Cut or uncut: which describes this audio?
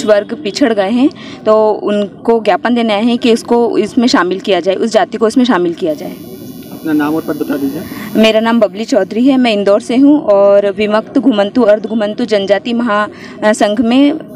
cut